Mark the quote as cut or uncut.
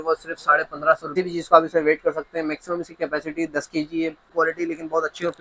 cut